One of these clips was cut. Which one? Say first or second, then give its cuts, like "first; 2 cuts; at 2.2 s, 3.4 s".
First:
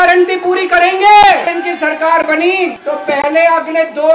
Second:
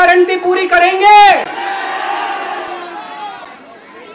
first; 2 cuts; at 1.5 s, 2.8 s